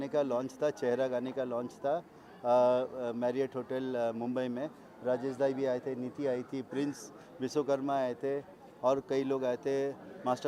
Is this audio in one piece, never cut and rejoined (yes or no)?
yes